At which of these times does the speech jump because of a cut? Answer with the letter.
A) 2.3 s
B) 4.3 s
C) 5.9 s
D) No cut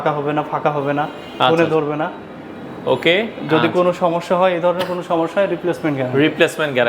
D